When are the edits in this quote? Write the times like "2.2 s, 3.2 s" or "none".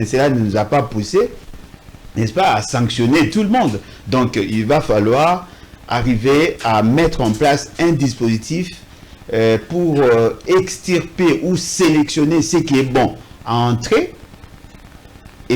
none